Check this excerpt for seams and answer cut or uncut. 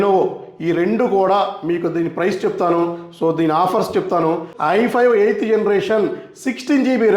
cut